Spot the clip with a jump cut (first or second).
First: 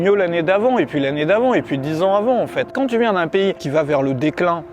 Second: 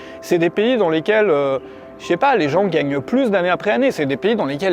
first